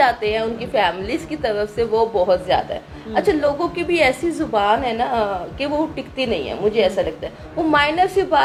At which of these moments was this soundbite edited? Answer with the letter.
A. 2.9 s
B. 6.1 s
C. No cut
C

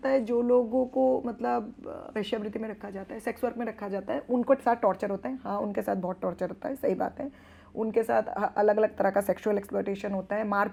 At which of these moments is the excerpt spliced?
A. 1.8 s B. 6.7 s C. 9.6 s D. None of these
D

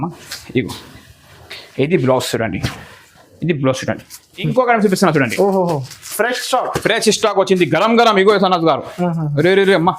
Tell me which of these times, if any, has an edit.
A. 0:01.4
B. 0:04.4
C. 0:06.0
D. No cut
B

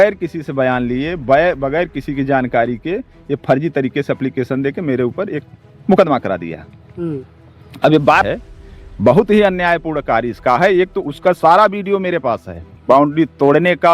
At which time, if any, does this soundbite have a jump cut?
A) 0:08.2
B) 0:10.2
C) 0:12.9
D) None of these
A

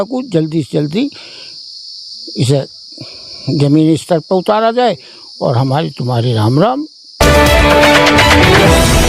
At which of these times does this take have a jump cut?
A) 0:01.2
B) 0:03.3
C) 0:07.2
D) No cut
C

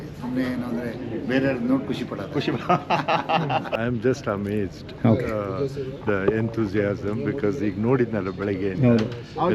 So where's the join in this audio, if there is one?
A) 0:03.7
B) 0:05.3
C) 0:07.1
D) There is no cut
A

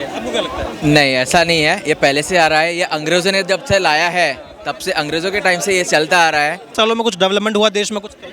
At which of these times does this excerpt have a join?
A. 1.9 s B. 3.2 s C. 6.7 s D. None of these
C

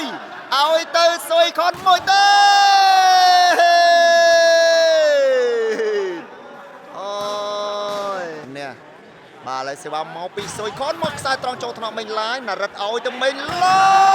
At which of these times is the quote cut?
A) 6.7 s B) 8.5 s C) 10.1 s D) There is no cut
B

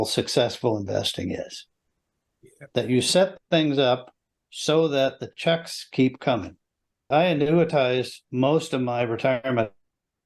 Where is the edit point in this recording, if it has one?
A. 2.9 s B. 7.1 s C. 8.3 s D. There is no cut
B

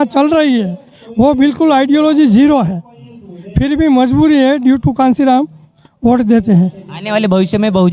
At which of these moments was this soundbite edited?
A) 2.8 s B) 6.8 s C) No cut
C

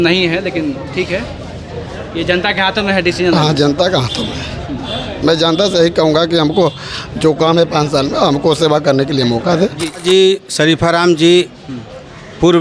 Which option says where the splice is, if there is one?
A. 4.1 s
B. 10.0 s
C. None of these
B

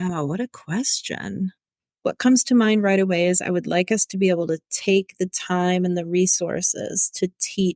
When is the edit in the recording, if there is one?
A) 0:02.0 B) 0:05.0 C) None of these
A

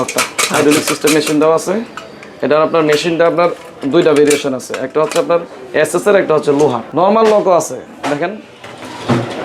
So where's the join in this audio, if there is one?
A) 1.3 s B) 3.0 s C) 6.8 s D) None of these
C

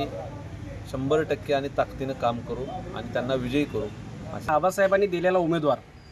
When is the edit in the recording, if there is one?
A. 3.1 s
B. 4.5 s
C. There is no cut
B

